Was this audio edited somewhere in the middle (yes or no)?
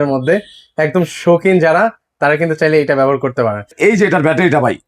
yes